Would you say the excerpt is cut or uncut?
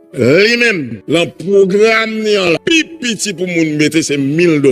cut